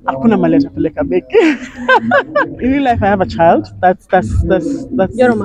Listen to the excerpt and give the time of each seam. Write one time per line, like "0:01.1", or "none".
0:02.5

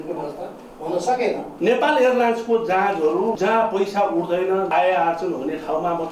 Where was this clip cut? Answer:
0:01.5
0:03.4
0:04.7

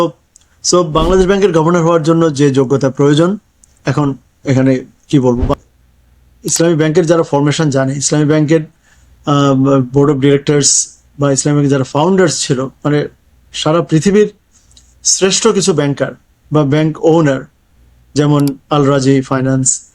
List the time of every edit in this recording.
0:05.5

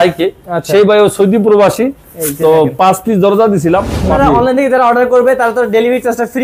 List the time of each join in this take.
0:04.1

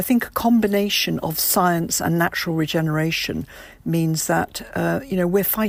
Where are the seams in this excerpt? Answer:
none

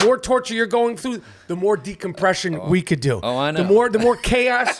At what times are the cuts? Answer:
none

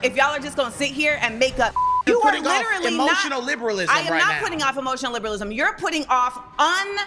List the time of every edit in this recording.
0:02.0

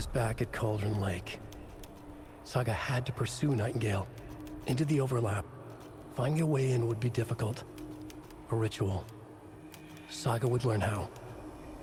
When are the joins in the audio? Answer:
none

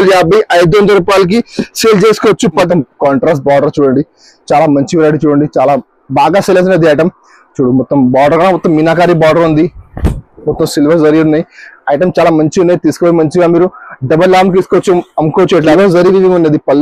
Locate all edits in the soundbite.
0:02.7
0:15.7

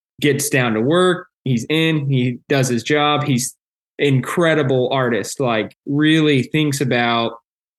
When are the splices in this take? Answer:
none

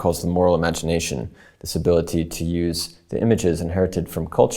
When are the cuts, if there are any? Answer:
none

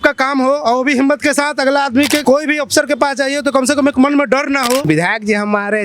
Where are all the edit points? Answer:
0:02.2
0:04.8

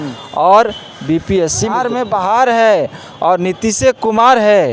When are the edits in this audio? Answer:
0:01.8

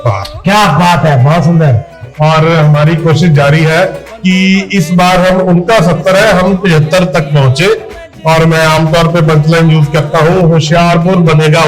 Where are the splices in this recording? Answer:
none

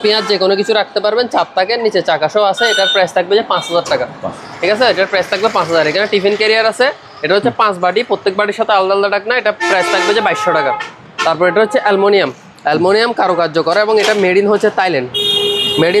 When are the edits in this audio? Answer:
none

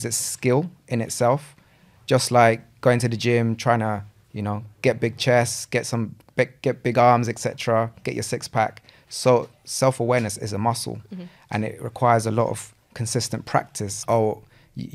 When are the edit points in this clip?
0:13.8

